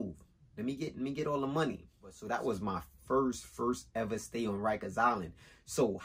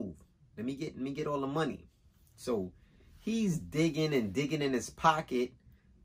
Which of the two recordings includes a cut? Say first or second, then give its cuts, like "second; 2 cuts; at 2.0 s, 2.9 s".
first; 1 cut; at 2.2 s